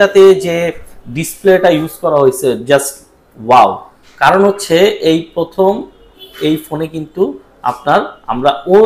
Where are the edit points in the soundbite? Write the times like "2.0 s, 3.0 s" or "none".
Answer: none